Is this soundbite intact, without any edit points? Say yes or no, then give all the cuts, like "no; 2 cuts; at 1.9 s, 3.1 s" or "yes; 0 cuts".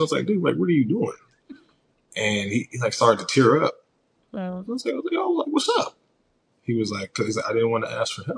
yes; 0 cuts